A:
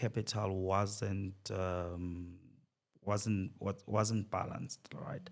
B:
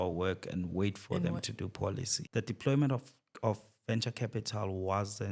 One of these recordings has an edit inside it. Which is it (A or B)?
B